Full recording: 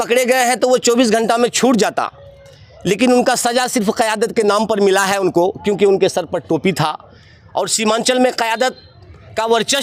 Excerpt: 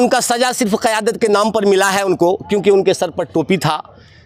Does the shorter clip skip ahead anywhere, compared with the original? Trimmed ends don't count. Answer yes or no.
no